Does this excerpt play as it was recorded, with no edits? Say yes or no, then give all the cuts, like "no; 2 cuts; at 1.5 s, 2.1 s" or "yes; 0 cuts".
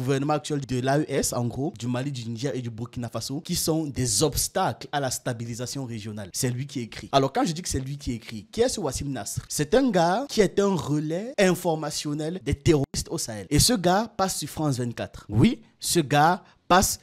yes; 0 cuts